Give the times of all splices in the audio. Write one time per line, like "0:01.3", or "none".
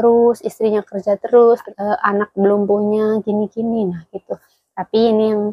0:01.7